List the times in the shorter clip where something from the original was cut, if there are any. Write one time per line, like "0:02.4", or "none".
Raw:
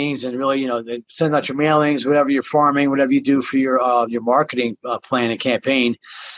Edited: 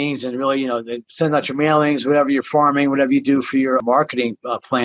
0:03.8